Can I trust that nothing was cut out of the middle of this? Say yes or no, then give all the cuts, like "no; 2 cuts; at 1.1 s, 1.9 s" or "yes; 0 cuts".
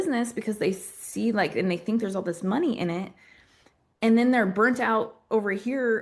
yes; 0 cuts